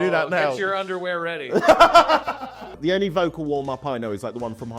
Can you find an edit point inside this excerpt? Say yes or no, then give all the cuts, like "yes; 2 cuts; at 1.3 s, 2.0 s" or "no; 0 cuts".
yes; 1 cut; at 2.7 s